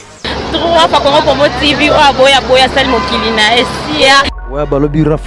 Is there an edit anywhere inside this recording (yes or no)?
yes